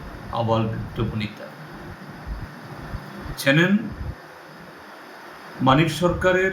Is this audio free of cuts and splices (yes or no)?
yes